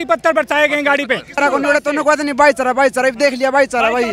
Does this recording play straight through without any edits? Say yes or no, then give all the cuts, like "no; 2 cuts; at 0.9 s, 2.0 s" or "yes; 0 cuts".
no; 1 cut; at 1.4 s